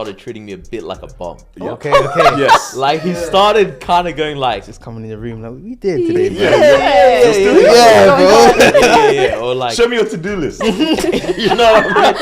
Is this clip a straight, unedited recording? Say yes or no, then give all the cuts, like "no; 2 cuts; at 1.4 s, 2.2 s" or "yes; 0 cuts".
yes; 0 cuts